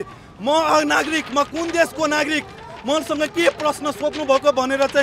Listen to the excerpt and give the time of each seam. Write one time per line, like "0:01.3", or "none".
none